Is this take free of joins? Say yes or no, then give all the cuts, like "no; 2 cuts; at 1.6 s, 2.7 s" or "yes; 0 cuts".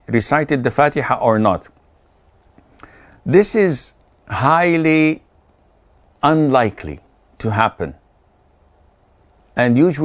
yes; 0 cuts